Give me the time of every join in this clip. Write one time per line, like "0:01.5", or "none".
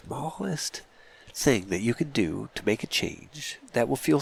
none